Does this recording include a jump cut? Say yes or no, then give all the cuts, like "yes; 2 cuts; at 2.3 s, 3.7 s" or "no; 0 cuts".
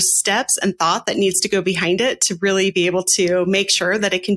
no; 0 cuts